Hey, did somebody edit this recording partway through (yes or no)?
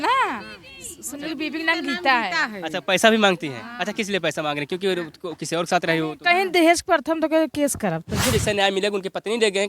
yes